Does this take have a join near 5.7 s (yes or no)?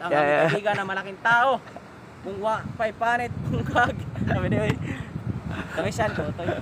no